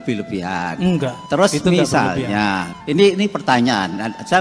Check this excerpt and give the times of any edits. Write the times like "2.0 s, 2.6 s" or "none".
1.2 s, 2.7 s